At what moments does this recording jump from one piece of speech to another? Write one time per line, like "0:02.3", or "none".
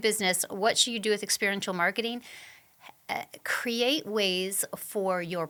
none